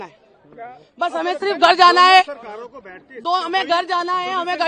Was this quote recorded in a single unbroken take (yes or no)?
yes